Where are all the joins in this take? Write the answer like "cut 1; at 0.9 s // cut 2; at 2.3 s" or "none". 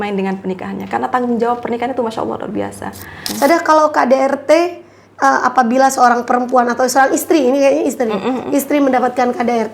cut 1; at 3.2 s